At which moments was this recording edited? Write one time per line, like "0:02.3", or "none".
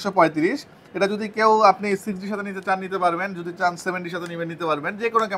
none